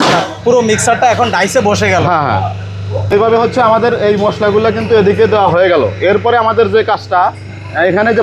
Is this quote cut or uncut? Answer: uncut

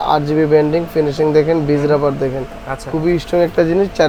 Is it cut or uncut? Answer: uncut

